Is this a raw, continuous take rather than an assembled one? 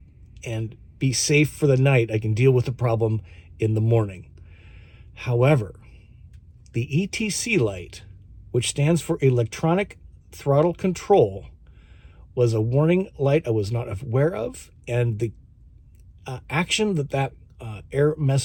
yes; 0 cuts

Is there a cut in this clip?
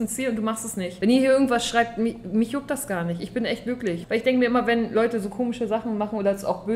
yes; 2 cuts; at 0.9 s, 4.0 s

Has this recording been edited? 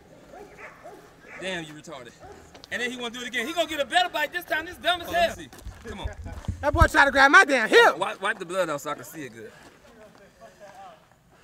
yes; 1 cut; at 6.0 s

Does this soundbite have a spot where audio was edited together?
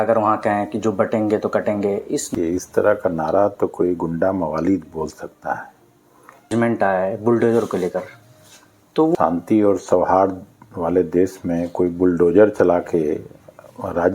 yes; 3 cuts; at 2.3 s, 6.5 s, 9.2 s

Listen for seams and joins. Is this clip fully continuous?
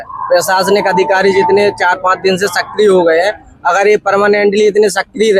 yes; 0 cuts

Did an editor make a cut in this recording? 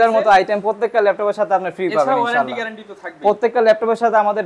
no; 0 cuts

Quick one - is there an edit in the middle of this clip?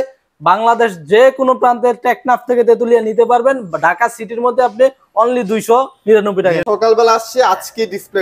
yes; 1 cut; at 6.6 s

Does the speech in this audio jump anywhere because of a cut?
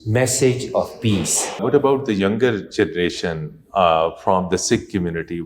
yes; 1 cut; at 1.6 s

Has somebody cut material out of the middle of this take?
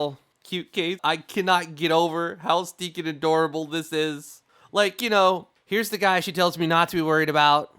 yes; 2 cuts; at 1.0 s, 5.5 s

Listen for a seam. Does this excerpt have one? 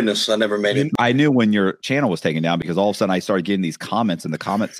yes; 2 cuts; at 0.9 s, 1.8 s

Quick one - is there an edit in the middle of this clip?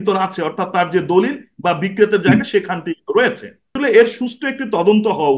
yes; 1 cut; at 3.7 s

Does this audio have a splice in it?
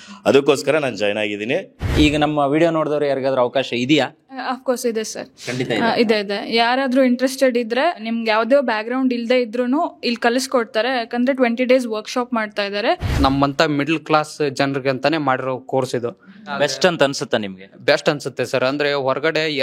yes; 4 cuts; at 1.9 s, 8.0 s, 13.1 s, 16.5 s

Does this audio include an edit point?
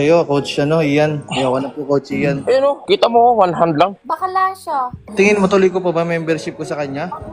yes; 1 cut; at 5.0 s

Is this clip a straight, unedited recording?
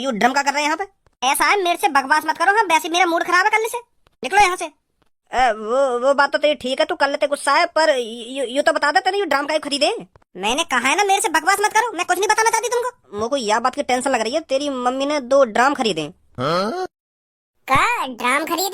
no; 1 cut; at 13.1 s

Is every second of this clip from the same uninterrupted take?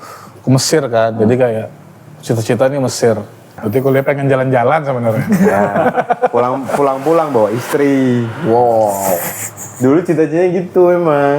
no; 1 cut; at 3.5 s

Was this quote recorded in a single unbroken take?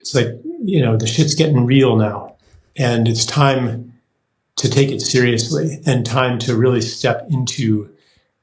yes; 0 cuts

